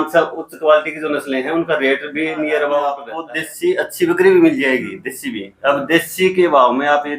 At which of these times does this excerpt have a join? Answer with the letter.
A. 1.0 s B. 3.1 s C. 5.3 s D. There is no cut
B